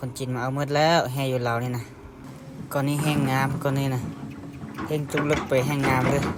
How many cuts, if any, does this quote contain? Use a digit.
0